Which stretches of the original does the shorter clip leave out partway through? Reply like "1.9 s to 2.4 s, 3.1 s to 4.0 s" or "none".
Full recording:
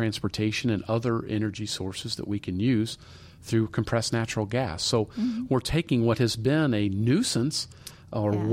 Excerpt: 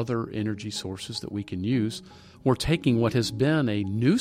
3.3 s to 5.4 s